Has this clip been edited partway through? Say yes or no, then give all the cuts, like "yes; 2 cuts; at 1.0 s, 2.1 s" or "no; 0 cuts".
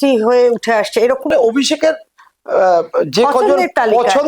yes; 1 cut; at 1.3 s